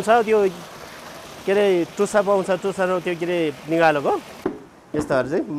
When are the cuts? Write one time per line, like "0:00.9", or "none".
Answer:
0:04.3

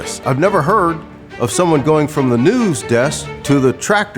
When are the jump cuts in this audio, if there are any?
0:03.3

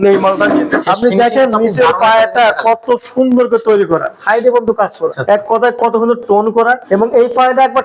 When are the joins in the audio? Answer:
0:00.8
0:04.1
0:05.2
0:06.8

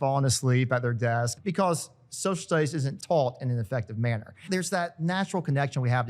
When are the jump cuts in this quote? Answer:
0:01.3
0:02.9
0:04.4

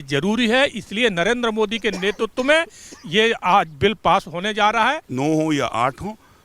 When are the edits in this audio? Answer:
0:05.1

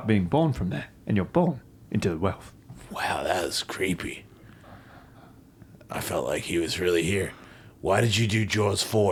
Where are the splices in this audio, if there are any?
none

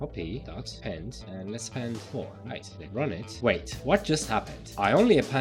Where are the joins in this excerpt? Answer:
0:02.8

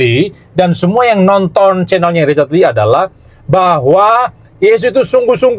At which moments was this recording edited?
none

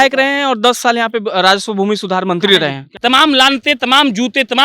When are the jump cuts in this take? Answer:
0:02.9

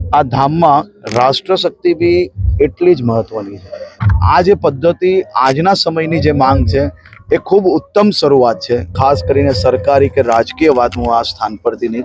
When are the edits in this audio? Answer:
0:04.0
0:08.9

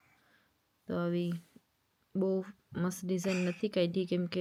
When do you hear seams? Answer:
none

